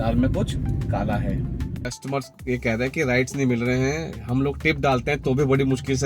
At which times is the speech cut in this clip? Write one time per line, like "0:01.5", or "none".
0:01.9